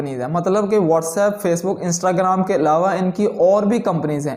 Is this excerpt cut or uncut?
uncut